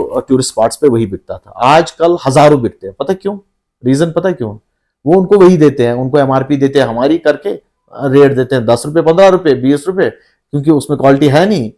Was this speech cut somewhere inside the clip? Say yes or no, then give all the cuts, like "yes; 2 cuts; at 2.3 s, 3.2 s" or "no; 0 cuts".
no; 0 cuts